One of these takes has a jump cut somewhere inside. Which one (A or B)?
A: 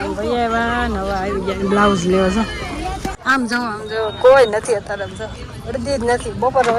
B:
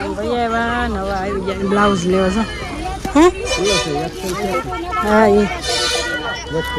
A